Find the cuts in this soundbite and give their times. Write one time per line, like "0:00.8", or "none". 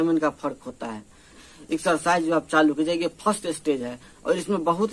0:01.5